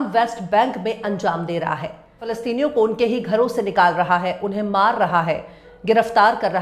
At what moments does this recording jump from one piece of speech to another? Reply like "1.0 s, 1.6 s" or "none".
2.3 s